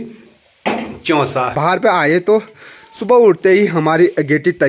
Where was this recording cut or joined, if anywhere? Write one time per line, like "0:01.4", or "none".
0:01.5